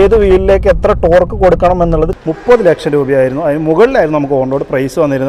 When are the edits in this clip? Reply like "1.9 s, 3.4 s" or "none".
2.2 s